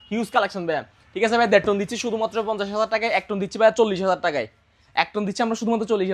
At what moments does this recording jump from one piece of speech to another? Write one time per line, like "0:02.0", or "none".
none